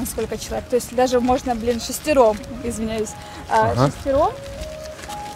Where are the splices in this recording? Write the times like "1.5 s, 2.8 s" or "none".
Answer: none